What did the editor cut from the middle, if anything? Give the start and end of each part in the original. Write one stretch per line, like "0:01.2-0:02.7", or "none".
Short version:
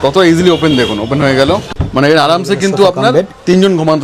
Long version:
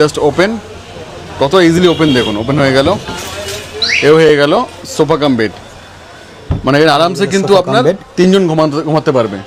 0:03.1-0:06.5